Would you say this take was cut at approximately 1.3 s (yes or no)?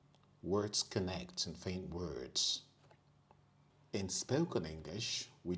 no